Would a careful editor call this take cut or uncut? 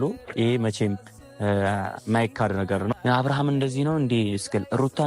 cut